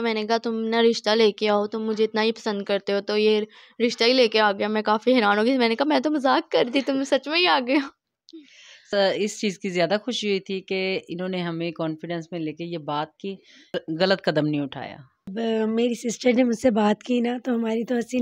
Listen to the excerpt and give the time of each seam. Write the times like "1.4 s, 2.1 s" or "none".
8.9 s, 14.0 s, 15.2 s